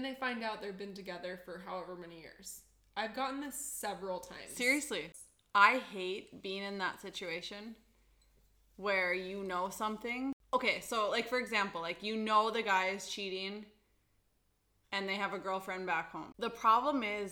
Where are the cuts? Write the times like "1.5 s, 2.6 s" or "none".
5.4 s, 10.4 s, 16.3 s